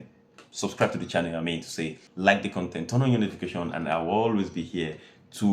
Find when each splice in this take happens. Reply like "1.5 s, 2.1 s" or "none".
2.0 s